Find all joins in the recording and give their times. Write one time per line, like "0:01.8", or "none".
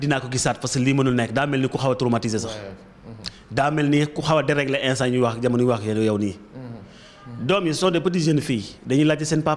none